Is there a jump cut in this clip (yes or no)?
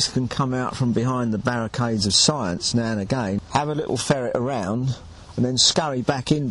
yes